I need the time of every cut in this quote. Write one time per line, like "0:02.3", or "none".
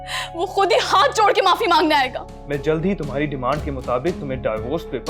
0:02.3